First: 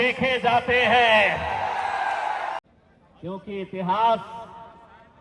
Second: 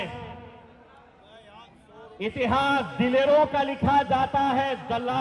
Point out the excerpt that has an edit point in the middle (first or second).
first